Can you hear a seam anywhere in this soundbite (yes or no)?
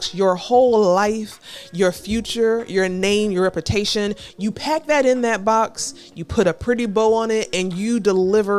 no